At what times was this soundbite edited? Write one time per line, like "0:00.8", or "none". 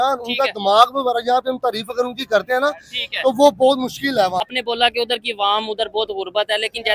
0:04.4